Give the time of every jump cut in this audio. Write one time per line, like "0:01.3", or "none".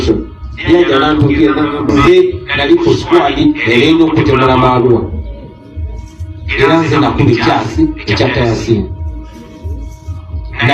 0:01.9